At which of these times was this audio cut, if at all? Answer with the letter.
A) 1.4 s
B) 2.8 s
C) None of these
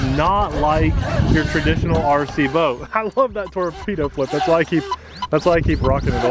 C